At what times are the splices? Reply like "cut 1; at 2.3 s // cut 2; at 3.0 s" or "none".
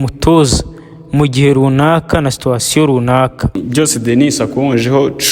cut 1; at 3.6 s